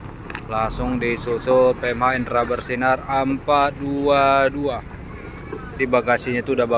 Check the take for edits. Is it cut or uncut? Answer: cut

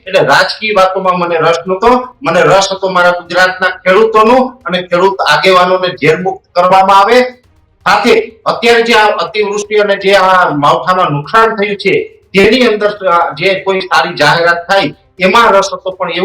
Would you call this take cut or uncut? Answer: uncut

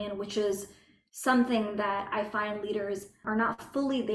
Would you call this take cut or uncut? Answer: cut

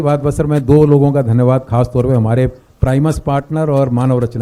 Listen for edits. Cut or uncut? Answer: uncut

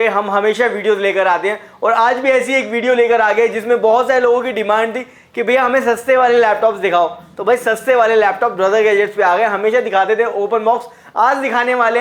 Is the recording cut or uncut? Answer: uncut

